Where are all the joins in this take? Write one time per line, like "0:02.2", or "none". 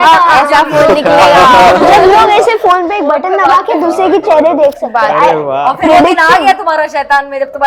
none

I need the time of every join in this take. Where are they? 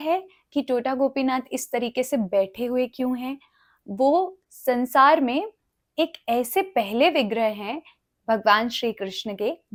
none

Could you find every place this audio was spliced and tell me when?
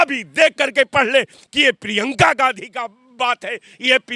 none

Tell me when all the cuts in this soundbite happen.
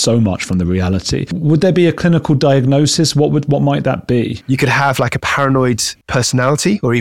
0:01.3
0:04.3

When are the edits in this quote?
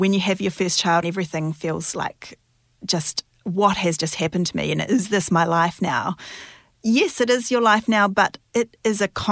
0:01.0

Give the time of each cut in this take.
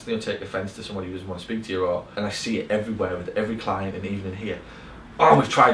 0:02.1

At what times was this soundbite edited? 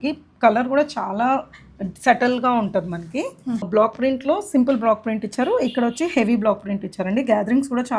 0:03.6

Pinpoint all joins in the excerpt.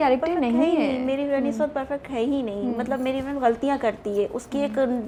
none

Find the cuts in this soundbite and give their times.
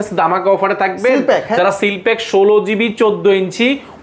none

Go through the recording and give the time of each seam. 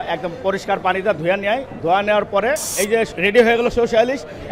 0:02.7

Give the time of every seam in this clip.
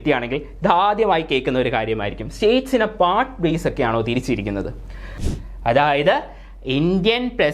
0:05.1

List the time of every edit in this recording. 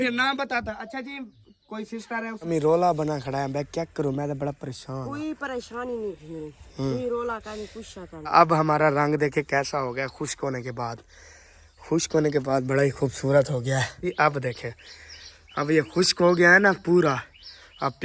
0:02.5
0:08.3
0:14.1

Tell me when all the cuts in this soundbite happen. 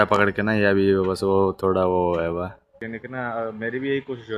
0:02.7

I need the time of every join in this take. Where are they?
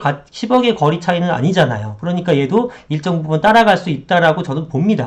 none

